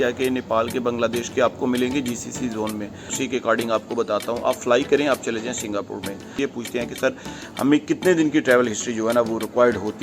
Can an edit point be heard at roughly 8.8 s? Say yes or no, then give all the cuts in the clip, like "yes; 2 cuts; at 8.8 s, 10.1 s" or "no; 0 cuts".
no; 2 cuts; at 3.2 s, 6.4 s